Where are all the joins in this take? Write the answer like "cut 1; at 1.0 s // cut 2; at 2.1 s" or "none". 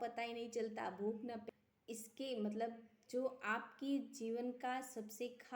cut 1; at 1.4 s